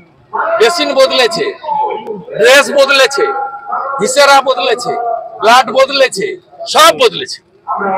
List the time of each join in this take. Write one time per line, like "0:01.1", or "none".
none